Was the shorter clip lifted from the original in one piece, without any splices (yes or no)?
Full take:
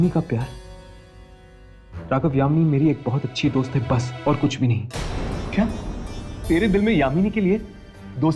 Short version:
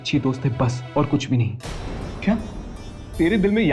yes